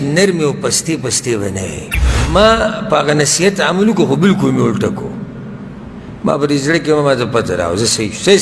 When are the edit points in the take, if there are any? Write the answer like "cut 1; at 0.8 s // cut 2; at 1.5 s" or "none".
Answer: cut 1; at 2.3 s